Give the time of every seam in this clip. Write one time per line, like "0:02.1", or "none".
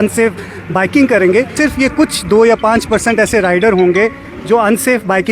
0:01.5